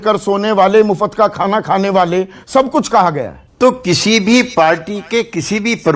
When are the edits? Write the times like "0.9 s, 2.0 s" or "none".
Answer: 3.3 s